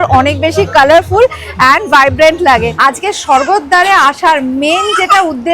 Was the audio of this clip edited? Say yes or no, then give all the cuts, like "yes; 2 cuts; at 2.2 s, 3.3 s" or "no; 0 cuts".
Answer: yes; 1 cut; at 2.7 s